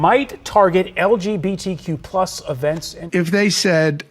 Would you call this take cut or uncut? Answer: cut